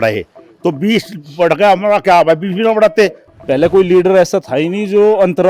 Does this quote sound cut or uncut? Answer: cut